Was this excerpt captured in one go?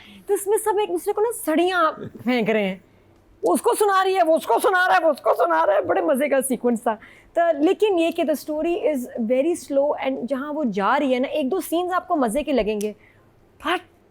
yes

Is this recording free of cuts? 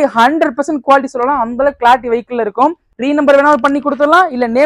no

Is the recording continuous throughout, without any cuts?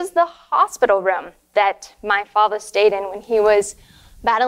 yes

